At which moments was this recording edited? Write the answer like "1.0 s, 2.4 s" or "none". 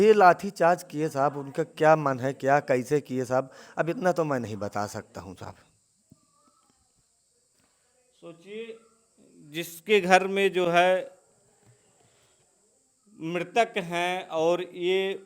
none